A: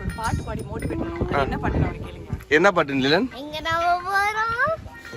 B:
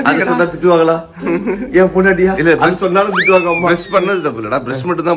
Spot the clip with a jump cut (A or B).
A